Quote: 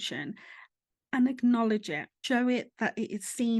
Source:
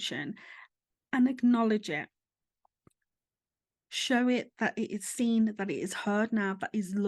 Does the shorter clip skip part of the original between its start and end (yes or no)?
yes